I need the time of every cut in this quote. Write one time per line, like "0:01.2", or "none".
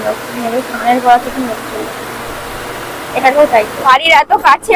0:03.8

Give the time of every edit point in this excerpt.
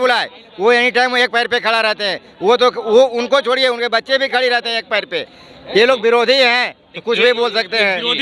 none

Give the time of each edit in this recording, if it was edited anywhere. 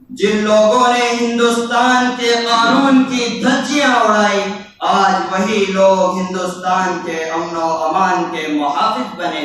none

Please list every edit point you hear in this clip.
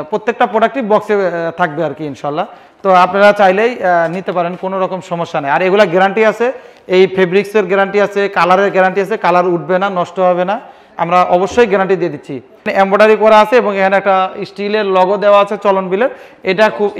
0:12.7

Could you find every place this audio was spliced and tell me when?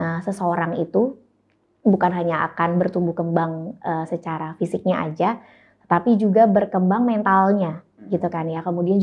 none

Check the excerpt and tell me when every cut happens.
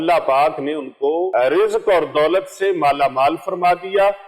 0:01.3

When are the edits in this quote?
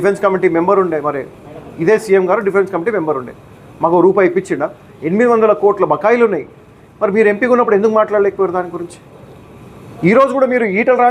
none

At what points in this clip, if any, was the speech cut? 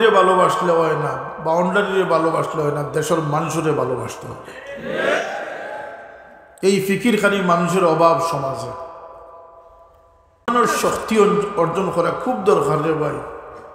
0:10.5

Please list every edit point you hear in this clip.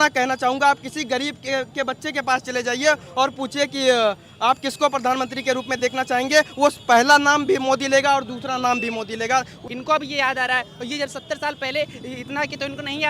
0:09.6

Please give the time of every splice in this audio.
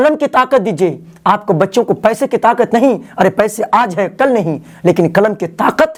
none

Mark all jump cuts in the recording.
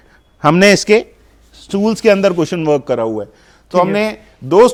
none

